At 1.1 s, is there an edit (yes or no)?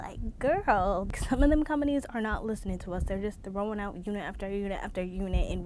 yes